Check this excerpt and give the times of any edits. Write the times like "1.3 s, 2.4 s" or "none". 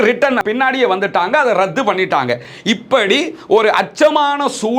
2.5 s